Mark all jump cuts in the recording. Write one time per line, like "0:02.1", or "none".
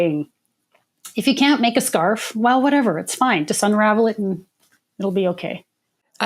none